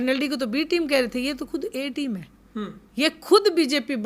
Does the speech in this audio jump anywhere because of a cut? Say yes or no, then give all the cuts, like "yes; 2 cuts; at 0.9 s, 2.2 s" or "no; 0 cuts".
no; 0 cuts